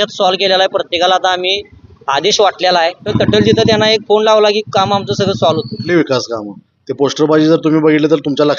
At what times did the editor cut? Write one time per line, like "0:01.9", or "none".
0:03.1
0:05.8